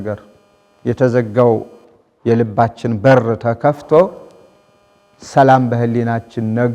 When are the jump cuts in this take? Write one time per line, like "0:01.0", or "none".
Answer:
none